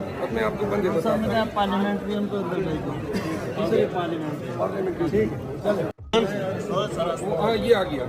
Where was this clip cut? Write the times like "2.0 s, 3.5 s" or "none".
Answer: 5.9 s